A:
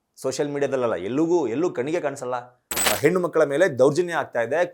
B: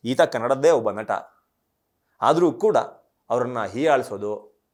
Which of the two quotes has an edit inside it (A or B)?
A